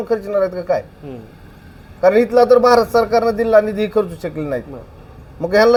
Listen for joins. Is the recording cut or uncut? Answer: uncut